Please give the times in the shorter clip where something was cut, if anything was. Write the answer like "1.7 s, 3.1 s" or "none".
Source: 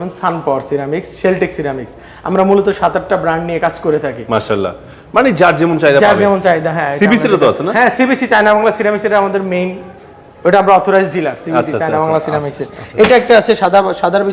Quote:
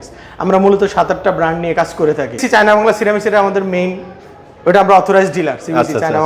2.4 s